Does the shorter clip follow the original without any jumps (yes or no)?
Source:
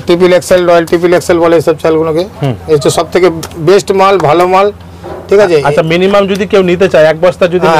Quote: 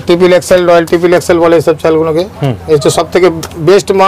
yes